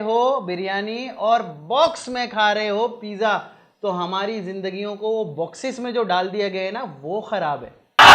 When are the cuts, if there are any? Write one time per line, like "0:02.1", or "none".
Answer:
none